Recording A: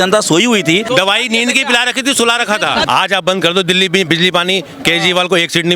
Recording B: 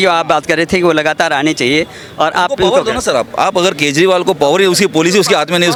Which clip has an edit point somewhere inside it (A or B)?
A